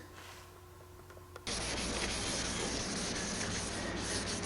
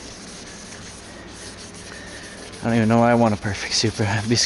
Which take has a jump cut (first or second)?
first